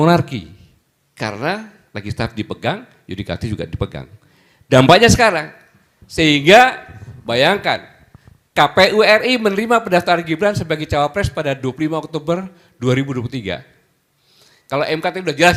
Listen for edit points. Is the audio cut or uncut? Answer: uncut